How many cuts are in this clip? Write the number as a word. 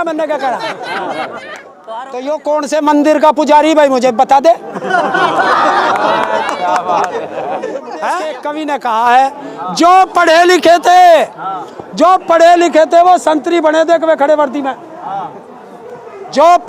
two